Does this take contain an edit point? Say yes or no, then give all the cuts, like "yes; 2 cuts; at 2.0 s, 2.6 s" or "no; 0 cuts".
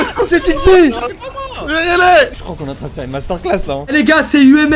yes; 2 cuts; at 2.4 s, 3.8 s